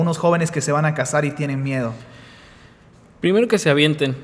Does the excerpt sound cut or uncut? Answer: uncut